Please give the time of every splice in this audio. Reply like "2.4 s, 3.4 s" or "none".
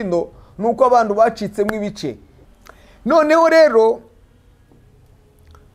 2.3 s